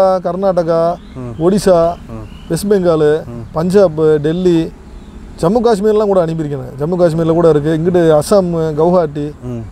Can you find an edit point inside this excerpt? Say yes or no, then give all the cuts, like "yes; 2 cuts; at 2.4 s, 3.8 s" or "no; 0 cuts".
no; 0 cuts